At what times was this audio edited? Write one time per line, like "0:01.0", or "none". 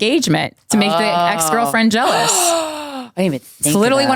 none